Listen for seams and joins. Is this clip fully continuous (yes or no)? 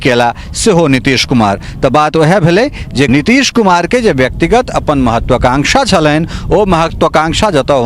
no